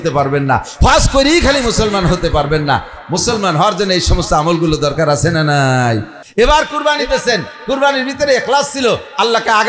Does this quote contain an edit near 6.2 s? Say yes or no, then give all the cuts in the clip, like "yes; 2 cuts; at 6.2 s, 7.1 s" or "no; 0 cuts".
yes; 1 cut; at 6.2 s